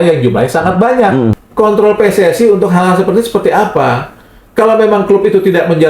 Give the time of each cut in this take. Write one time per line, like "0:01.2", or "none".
0:01.4

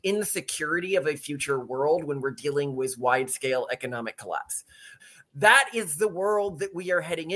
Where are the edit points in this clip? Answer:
0:04.8

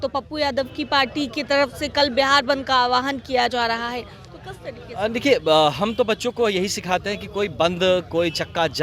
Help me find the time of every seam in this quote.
none

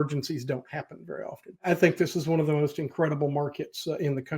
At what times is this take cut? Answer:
0:01.6

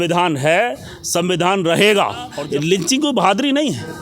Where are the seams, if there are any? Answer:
0:02.3

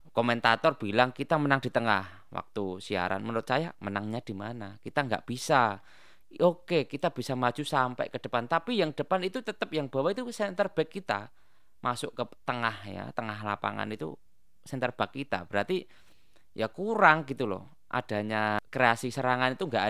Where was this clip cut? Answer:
0:18.6

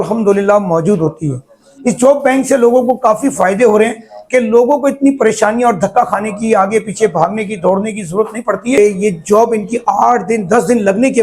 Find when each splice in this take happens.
0:01.6
0:08.8

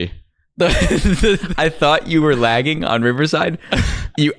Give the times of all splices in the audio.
0:01.5

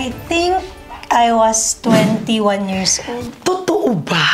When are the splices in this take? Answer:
none

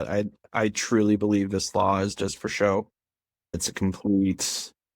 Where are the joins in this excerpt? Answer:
0:03.6

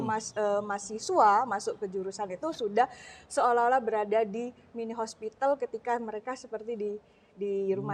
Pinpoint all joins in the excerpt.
none

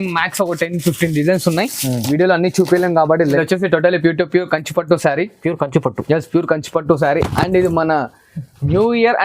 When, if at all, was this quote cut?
0:03.4

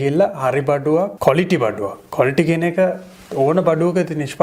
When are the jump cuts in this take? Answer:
0:01.1

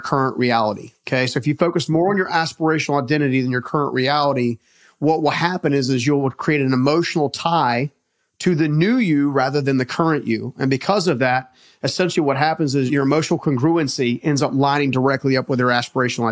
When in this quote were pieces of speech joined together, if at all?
0:00.9
0:12.9

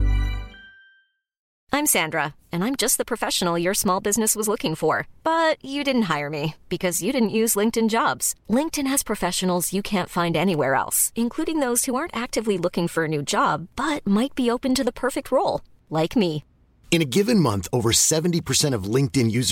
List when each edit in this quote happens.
0:01.5

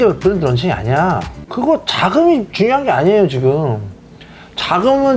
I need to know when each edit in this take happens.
0:01.4

